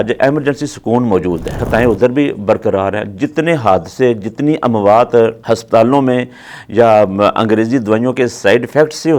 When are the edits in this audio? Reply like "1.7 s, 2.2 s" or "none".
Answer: 1.6 s, 5.4 s